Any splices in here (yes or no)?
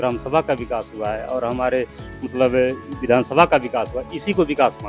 no